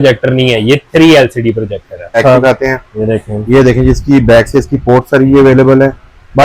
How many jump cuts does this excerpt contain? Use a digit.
1